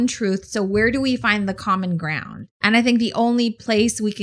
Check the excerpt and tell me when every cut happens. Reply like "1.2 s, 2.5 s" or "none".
2.5 s